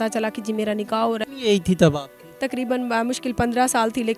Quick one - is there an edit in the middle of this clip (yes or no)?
yes